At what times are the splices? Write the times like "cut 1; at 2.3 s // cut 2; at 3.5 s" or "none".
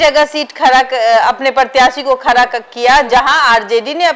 none

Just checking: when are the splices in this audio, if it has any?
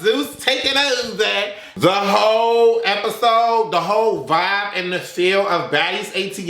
cut 1; at 1.6 s

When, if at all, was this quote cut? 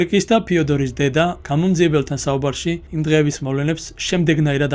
cut 1; at 1.4 s // cut 2; at 2.9 s

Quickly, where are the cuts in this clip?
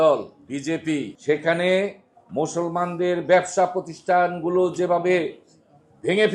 cut 1; at 1.1 s

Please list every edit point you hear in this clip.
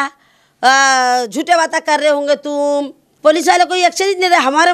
cut 1; at 3.0 s

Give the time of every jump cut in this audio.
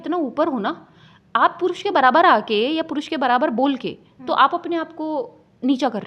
none

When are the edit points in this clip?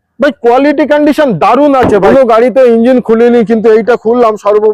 cut 1; at 2.0 s

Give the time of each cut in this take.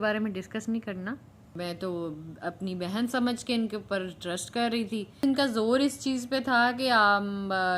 cut 1; at 1.6 s // cut 2; at 5.2 s

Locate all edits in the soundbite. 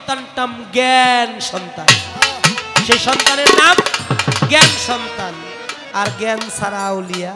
none

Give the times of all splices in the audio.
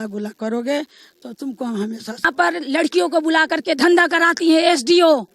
cut 1; at 2.2 s

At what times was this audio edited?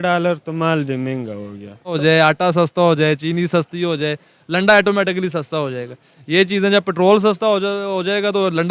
cut 1; at 1.9 s

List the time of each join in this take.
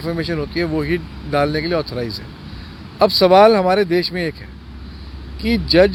none

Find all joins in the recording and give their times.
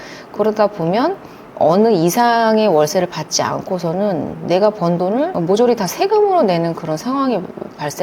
cut 1; at 1.4 s

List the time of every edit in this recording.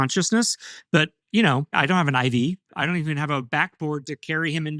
none

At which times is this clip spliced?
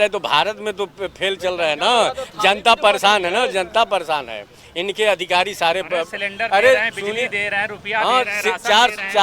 none

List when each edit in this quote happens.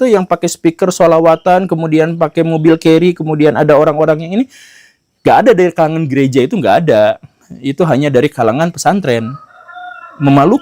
none

